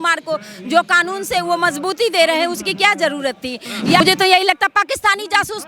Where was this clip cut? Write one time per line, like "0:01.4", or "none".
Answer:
0:04.0